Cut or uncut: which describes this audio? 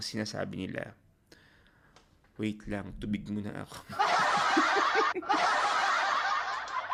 uncut